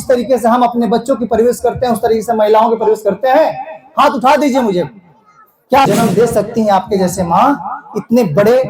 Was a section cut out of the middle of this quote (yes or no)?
yes